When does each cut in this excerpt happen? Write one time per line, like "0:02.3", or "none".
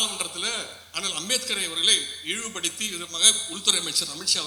none